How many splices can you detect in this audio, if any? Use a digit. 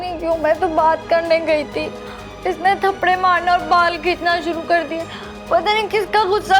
0